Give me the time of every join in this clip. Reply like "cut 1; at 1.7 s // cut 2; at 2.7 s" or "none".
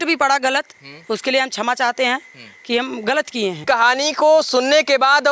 cut 1; at 3.6 s